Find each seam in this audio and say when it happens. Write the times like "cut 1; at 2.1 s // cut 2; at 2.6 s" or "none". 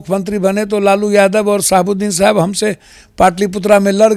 none